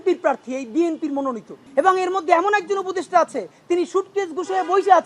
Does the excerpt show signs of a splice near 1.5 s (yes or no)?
yes